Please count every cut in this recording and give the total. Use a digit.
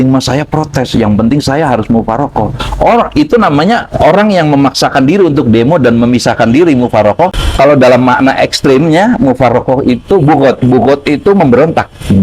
1